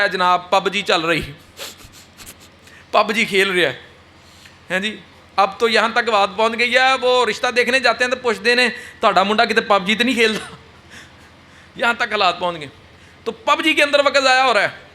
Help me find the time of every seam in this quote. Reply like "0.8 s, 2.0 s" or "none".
none